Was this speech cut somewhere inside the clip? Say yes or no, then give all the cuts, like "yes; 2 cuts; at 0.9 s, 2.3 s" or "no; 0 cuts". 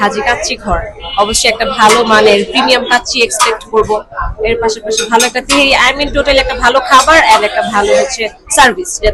no; 0 cuts